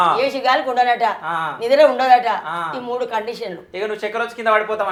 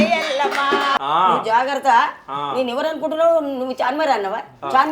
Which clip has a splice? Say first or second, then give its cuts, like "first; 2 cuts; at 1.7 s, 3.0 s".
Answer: second; 1 cut; at 0.9 s